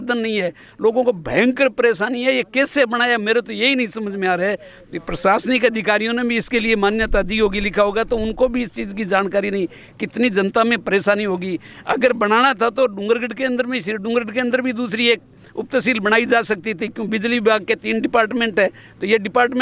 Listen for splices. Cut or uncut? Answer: uncut